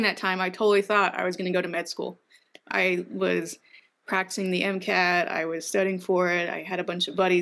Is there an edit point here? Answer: no; 0 cuts

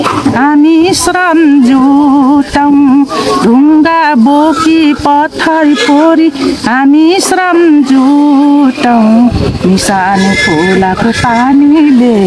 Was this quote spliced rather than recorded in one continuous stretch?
no; 0 cuts

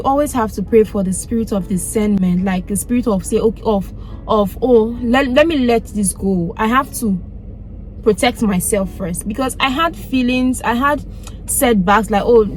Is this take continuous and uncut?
yes; 0 cuts

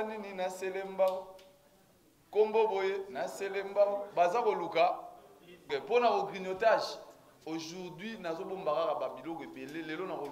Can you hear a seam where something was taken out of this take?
yes; 1 cut; at 5.7 s

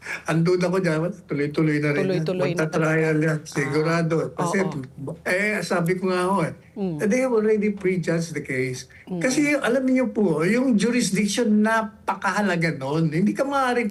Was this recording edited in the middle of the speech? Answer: no; 0 cuts

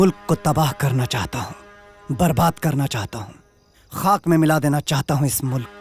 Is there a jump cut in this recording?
no; 0 cuts

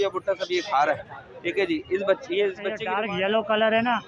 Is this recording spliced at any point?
yes; 1 cut; at 2.9 s

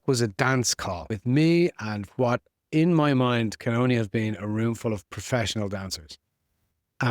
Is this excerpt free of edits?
no; 1 cut; at 1.1 s

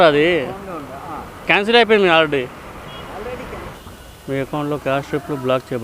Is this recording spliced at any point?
yes; 1 cut; at 3.6 s

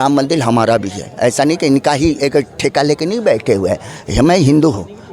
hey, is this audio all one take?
yes; 0 cuts

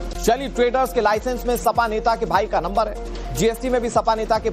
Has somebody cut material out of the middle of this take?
no; 0 cuts

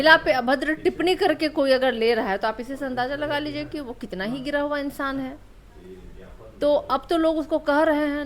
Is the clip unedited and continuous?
yes; 0 cuts

